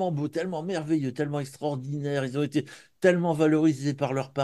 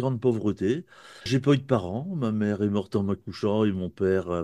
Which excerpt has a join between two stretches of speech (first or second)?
second